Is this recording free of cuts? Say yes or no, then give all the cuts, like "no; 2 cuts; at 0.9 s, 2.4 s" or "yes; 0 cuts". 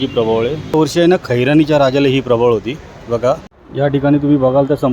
no; 2 cuts; at 0.7 s, 3.6 s